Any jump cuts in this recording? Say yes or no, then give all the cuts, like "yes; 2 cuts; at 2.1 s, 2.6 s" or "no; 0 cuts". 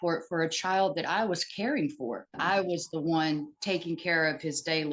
yes; 1 cut; at 2.4 s